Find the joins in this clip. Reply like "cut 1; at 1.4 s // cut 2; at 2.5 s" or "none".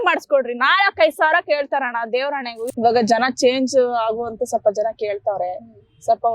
cut 1; at 2.7 s